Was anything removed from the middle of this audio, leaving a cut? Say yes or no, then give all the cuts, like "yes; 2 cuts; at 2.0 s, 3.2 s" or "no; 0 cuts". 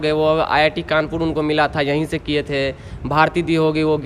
no; 0 cuts